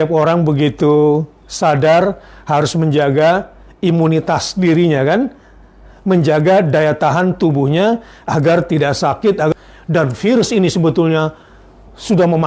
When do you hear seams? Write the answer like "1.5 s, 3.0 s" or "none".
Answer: 9.5 s